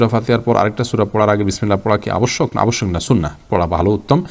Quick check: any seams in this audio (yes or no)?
no